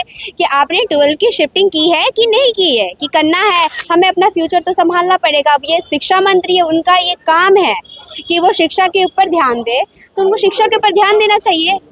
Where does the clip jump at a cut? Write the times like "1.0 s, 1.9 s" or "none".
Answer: 3.8 s